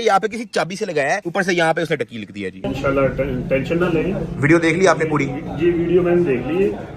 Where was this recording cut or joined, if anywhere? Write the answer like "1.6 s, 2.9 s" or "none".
2.7 s

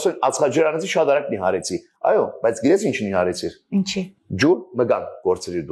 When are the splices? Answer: none

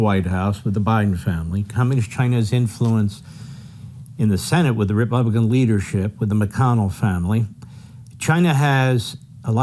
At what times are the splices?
none

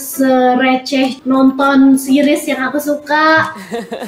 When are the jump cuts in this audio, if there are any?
1.2 s

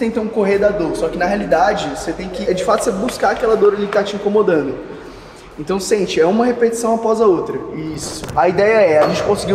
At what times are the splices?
2.4 s, 8.3 s

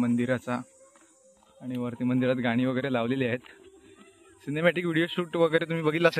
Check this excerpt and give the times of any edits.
none

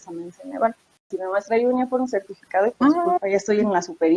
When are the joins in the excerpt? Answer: 1.0 s

